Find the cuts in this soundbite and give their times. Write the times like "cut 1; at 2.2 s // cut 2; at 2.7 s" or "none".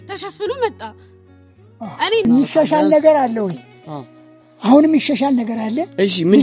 cut 1; at 2.2 s